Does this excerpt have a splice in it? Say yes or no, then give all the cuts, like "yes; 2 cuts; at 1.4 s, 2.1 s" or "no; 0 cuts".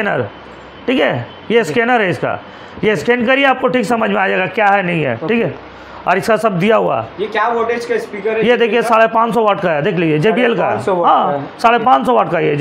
no; 0 cuts